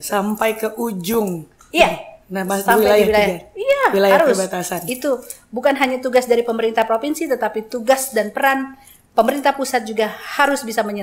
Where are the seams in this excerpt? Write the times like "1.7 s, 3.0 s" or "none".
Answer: none